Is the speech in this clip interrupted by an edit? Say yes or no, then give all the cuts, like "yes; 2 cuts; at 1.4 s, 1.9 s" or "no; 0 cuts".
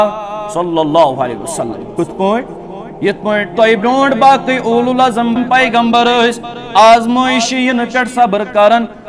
yes; 1 cut; at 5.3 s